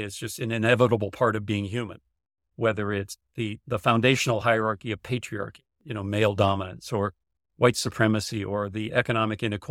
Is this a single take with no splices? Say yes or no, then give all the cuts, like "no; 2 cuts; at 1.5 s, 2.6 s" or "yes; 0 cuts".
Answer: yes; 0 cuts